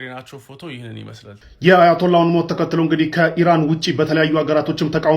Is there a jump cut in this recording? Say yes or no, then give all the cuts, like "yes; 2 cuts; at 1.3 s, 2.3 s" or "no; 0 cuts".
yes; 1 cut; at 1.3 s